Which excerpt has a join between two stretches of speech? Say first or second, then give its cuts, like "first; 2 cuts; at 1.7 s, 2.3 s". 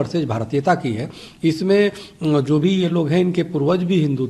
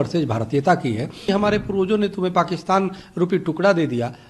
second; 1 cut; at 1.3 s